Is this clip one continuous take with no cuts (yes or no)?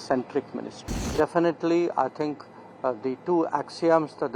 no